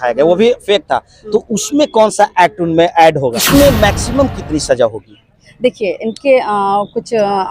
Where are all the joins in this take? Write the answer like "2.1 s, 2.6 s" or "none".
3.4 s

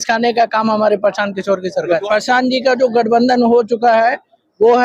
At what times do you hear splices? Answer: 2.0 s

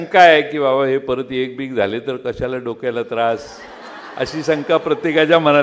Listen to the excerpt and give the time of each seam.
none

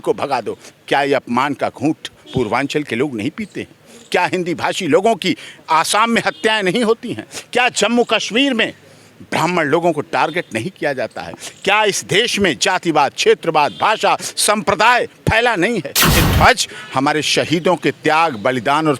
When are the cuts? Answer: 16.2 s

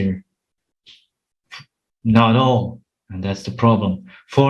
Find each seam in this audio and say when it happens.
none

